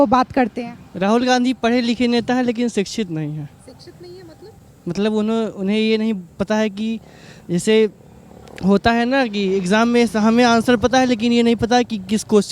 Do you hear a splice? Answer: no; 0 cuts

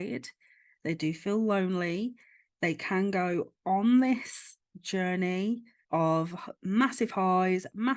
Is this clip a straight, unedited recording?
no; 1 cut; at 5.7 s

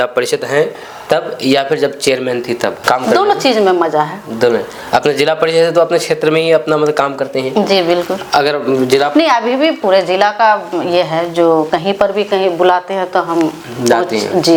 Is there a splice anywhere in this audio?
no; 0 cuts

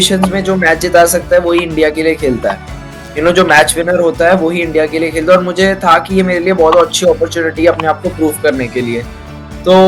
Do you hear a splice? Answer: no; 0 cuts

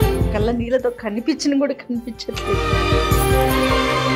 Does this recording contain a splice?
no; 0 cuts

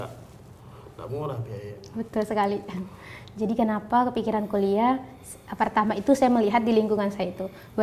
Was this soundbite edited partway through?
no; 0 cuts

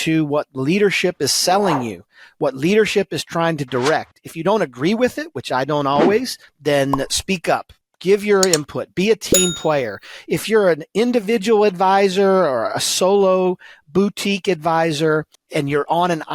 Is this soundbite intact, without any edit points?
yes; 0 cuts

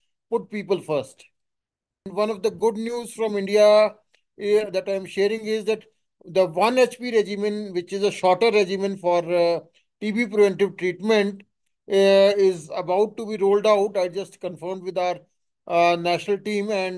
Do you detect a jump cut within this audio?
yes; 1 cut; at 2.0 s

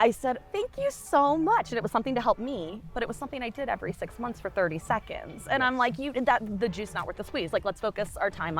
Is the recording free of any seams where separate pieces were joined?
yes; 0 cuts

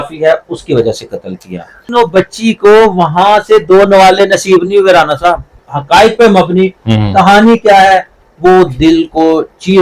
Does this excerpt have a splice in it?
yes; 2 cuts; at 1.8 s, 5.5 s

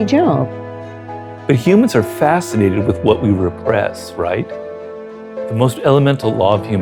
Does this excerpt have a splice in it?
yes; 1 cut; at 1.0 s

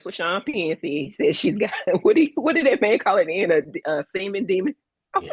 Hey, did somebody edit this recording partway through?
no; 0 cuts

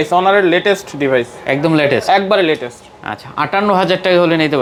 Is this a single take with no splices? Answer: yes; 0 cuts

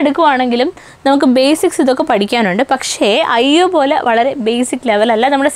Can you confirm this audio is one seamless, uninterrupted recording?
yes; 0 cuts

